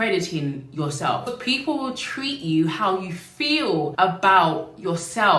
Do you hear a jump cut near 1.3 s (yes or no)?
yes